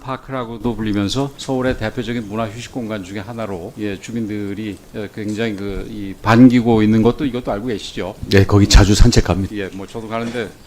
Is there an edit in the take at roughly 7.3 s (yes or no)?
no